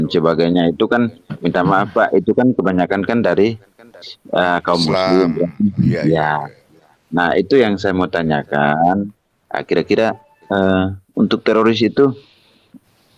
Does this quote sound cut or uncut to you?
uncut